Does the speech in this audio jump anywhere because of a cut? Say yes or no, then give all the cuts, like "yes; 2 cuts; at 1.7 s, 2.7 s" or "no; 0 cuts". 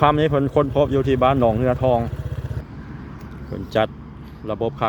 yes; 1 cut; at 2.6 s